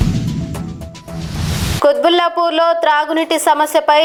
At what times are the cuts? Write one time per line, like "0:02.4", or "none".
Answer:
none